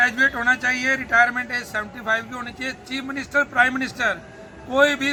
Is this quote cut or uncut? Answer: uncut